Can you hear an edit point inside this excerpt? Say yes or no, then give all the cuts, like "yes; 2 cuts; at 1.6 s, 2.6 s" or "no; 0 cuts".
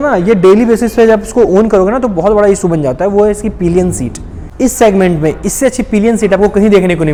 no; 0 cuts